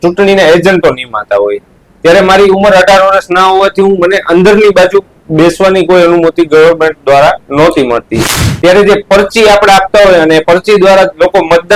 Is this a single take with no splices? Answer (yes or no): yes